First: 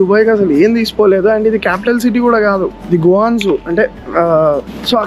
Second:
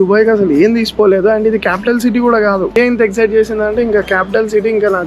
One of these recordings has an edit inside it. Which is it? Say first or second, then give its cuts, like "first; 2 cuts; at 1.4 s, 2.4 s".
second; 1 cut; at 2.7 s